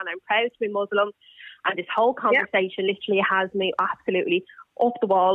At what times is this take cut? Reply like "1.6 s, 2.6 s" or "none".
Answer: none